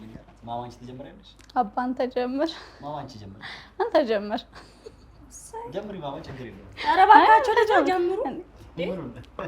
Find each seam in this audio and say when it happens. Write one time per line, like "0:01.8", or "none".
none